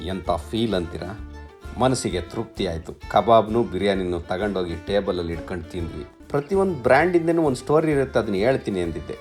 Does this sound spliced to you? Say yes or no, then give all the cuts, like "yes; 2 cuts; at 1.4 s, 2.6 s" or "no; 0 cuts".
yes; 1 cut; at 5.9 s